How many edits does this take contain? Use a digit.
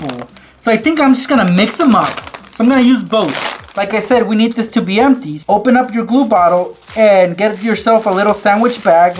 2